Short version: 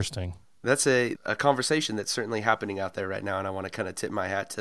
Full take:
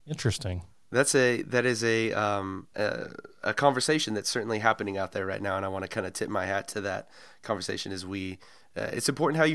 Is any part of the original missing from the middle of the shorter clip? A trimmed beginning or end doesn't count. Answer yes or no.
yes